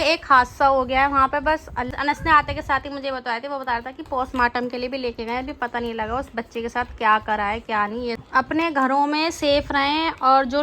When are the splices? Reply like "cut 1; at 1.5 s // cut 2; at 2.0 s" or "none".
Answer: cut 1; at 1.9 s // cut 2; at 8.2 s